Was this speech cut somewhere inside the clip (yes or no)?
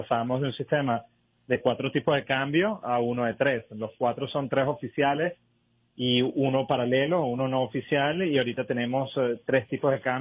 no